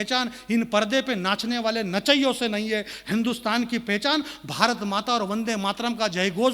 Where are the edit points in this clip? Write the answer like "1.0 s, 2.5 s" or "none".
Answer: none